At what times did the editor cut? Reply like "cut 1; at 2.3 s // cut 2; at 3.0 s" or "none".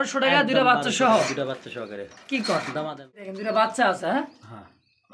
cut 1; at 3.3 s